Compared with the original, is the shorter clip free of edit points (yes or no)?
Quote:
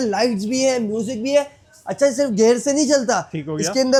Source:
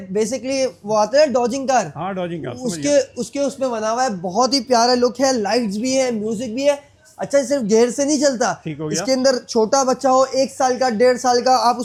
yes